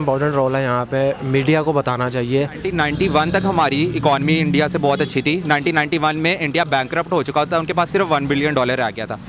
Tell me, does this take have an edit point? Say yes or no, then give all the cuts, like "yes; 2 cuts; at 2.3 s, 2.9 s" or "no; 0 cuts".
yes; 1 cut; at 2.6 s